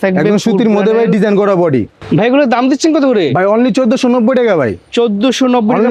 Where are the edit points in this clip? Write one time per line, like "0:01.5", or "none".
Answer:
none